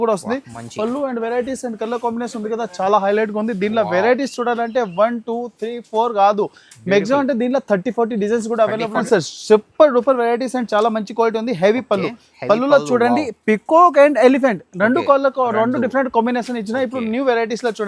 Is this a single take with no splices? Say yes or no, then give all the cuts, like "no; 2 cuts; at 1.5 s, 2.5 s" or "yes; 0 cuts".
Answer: no; 1 cut; at 9.0 s